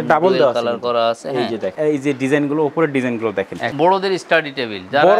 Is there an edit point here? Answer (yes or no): yes